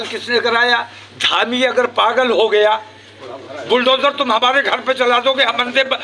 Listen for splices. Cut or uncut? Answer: uncut